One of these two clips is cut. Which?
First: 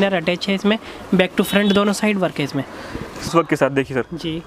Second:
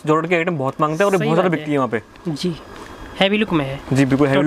first; 1 cut; at 3.3 s

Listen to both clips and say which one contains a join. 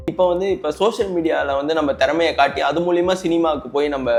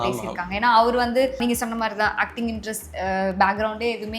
second; 1 cut; at 1.4 s

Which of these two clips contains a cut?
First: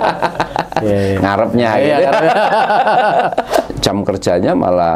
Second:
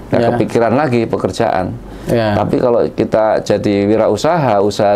first; 1 cut; at 3.7 s

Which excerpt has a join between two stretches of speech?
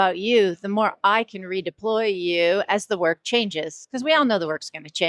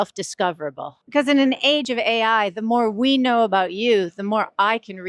second; 2 cuts; at 0.9 s, 1.8 s

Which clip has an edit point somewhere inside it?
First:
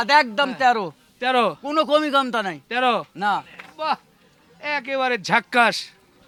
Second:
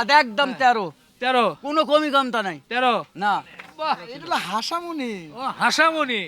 second; 1 cut; at 4.1 s

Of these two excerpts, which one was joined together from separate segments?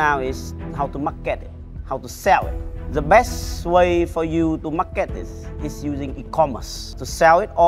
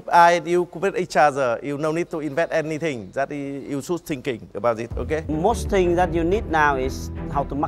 second; 1 cut; at 5.3 s

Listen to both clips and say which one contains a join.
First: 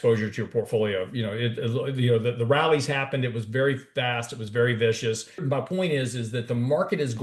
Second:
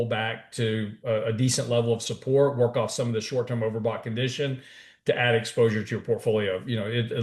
first; 1 cut; at 5.4 s

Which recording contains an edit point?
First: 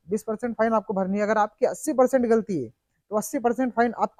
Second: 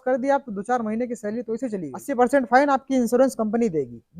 second; 1 cut; at 2.0 s

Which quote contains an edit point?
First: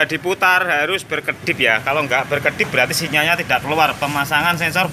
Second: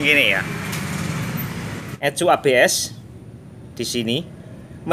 second; 1 cut; at 1.9 s

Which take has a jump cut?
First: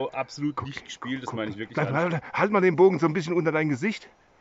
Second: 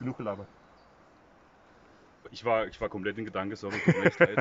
second; 1 cut; at 2.3 s

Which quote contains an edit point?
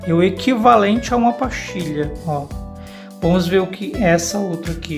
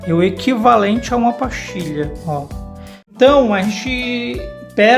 second; 1 cut; at 3.1 s

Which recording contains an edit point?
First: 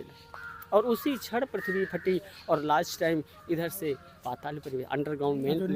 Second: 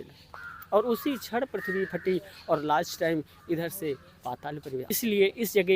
second; 1 cut; at 4.8 s

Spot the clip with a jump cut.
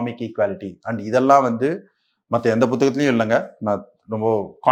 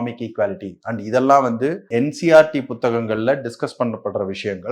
second; 1 cut; at 1.8 s

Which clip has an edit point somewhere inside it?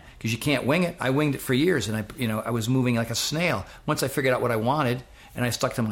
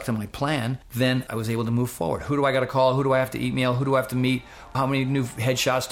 second; 2 cuts; at 1.1 s, 4.8 s

